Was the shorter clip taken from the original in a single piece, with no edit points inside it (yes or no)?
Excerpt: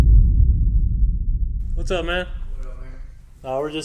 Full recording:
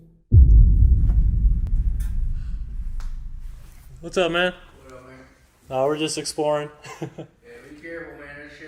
no